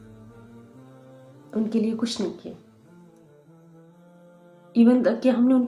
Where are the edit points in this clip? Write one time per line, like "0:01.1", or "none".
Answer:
0:03.0
0:04.5